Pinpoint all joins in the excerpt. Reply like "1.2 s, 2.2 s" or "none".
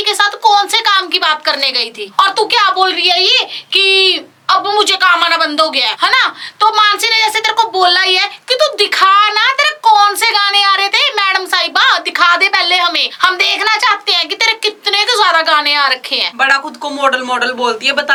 none